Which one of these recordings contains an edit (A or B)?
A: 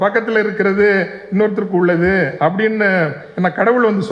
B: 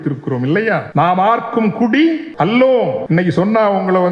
B